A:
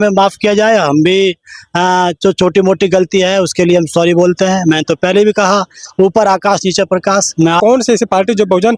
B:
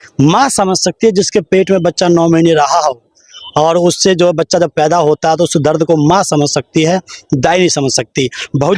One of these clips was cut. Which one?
A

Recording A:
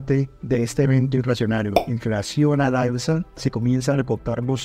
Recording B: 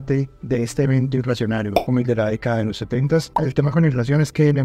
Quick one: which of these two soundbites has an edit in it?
B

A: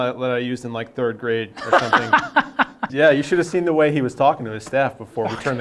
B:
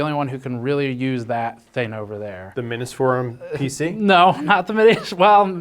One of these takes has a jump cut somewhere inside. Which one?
A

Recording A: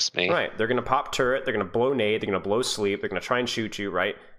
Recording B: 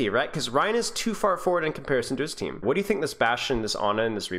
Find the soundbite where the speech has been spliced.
B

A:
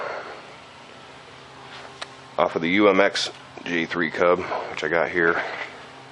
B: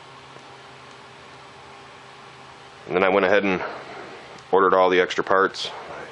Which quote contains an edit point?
A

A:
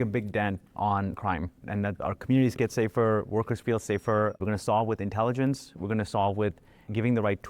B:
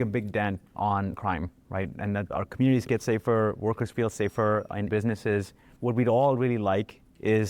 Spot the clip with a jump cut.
A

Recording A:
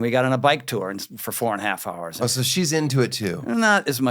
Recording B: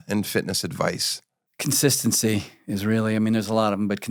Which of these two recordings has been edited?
A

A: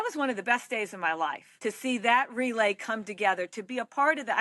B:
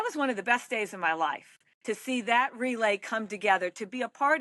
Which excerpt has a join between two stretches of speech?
A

